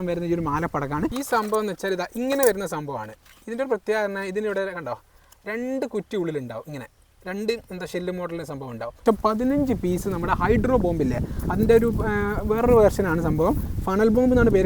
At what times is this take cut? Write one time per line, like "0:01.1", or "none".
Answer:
0:01.1
0:09.0